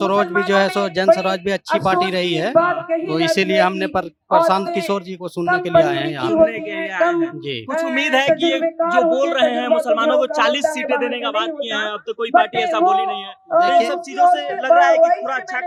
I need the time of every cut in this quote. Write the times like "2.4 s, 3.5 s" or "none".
none